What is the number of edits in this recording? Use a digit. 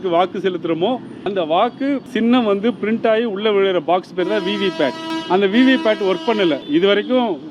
4